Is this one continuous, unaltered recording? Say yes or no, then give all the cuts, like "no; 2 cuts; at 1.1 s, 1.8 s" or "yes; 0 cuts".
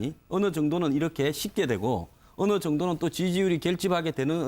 no; 1 cut; at 1.1 s